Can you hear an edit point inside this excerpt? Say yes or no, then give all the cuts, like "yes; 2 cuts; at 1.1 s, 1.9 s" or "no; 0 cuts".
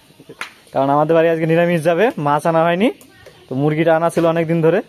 no; 0 cuts